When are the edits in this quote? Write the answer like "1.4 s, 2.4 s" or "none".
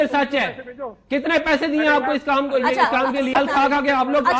3.3 s

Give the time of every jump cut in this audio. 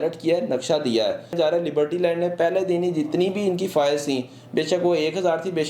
1.3 s

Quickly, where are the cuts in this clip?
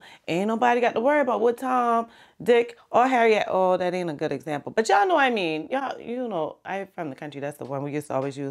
none

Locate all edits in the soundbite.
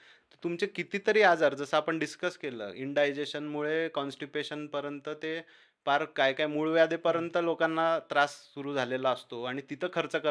none

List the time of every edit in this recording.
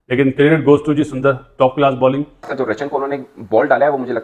2.5 s

